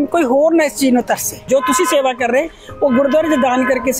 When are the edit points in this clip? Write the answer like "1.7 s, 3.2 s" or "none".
1.5 s